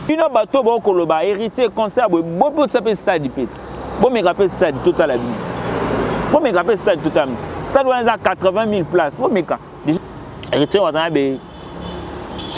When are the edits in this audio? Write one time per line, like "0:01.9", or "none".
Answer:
0:10.0